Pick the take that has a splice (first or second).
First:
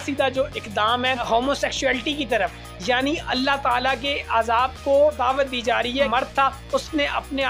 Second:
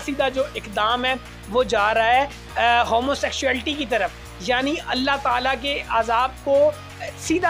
first